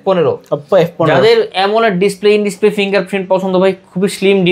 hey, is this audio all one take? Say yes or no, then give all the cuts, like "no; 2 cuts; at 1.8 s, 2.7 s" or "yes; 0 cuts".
yes; 0 cuts